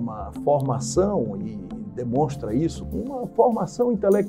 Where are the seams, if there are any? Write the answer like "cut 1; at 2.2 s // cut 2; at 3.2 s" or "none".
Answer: cut 1; at 2.8 s

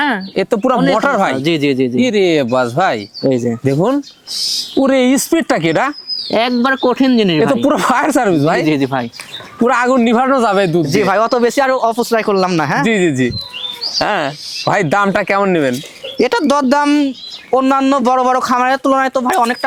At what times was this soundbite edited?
none

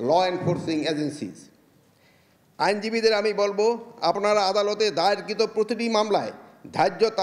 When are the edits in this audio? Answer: none

